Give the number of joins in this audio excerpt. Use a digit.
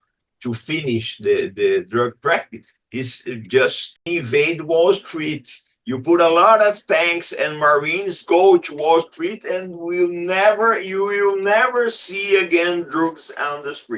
1